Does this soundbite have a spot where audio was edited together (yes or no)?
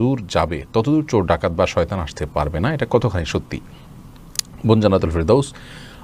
no